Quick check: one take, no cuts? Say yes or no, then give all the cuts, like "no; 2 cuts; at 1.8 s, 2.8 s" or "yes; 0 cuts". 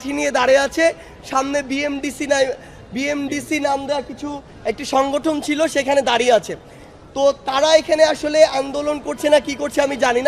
yes; 0 cuts